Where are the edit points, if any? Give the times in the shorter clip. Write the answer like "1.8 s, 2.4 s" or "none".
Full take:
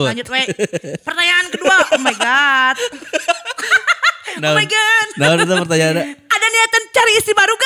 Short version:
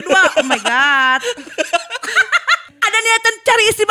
2.7 s